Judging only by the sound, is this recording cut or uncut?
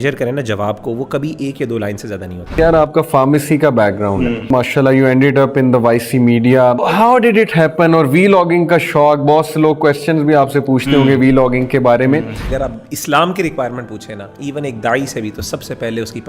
cut